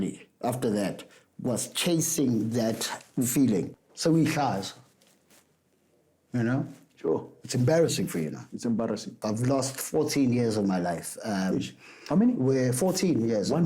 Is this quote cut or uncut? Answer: cut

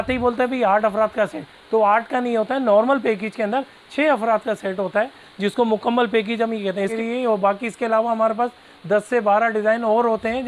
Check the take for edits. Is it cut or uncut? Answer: cut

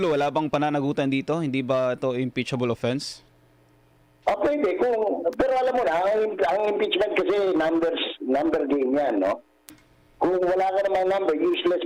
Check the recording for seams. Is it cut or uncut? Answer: uncut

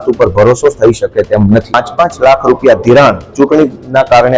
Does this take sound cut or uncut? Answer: cut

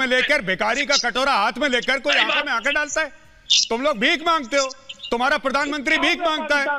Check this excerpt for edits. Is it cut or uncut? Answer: uncut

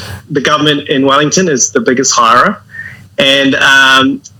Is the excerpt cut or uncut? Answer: uncut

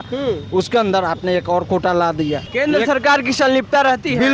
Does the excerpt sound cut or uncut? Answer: cut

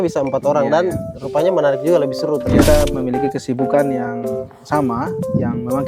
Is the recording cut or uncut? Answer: cut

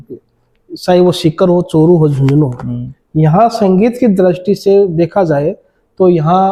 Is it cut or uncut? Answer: uncut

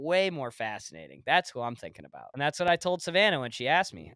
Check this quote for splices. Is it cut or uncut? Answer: cut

